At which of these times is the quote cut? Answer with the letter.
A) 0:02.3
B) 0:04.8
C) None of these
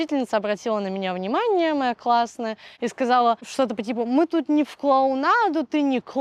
C